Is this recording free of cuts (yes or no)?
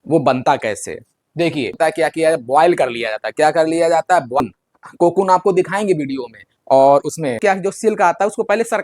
no